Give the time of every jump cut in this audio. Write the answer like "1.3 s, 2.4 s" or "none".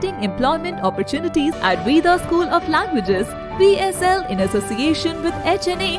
1.6 s